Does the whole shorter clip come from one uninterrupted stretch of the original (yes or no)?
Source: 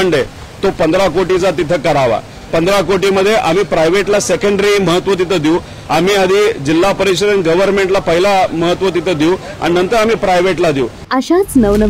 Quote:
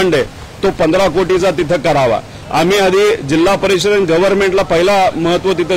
no